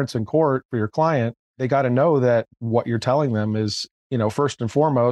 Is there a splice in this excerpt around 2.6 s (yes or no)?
no